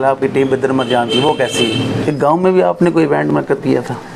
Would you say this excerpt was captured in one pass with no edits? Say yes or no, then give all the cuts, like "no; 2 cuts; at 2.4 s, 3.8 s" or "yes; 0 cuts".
no; 1 cut; at 2.0 s